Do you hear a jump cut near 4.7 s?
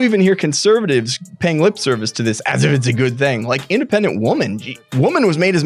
yes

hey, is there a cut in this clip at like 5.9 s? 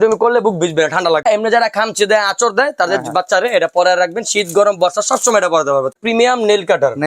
yes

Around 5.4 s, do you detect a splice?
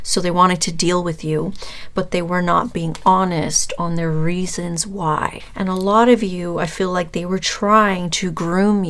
yes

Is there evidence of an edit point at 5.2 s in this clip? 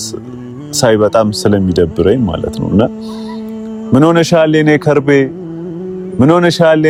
no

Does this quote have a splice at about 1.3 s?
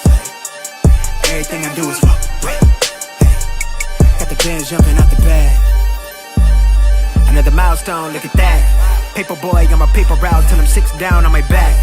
yes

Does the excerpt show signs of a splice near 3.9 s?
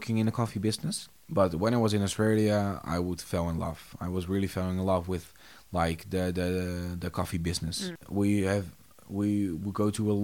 no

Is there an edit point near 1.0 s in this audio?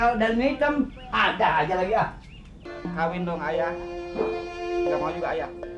no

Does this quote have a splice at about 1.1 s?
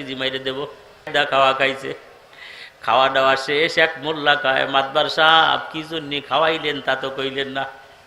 yes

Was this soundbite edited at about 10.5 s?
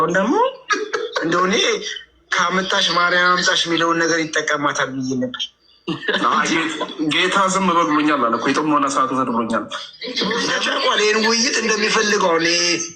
yes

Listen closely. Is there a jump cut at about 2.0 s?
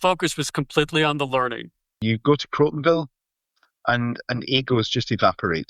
yes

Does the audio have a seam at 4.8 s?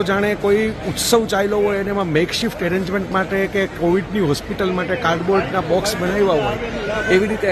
no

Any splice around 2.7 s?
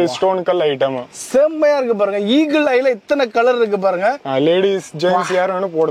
no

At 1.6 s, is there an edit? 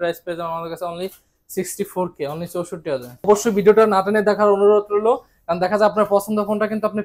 no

